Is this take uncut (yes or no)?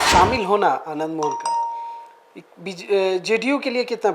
yes